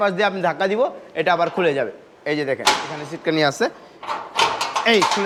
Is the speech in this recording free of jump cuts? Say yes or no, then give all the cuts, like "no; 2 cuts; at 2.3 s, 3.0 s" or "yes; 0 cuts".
yes; 0 cuts